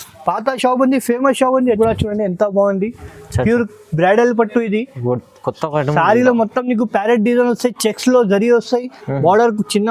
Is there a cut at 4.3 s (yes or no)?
no